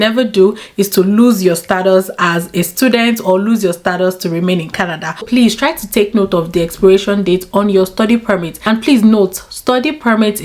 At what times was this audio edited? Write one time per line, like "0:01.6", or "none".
0:05.1
0:08.5